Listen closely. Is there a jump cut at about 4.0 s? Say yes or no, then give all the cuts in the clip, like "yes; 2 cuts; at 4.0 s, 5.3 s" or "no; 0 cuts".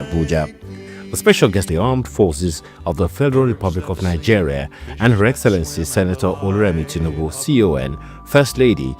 no; 1 cut; at 1.7 s